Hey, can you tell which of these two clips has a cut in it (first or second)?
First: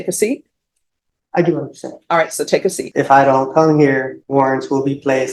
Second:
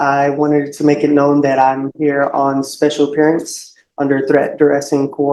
first